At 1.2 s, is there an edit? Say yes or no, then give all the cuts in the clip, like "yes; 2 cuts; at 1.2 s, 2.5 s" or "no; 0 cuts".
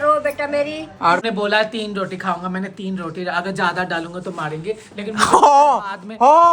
yes; 1 cut; at 1.2 s